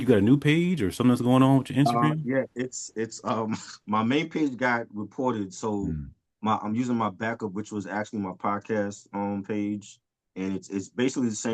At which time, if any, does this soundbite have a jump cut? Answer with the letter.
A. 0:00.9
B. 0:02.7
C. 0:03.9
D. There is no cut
D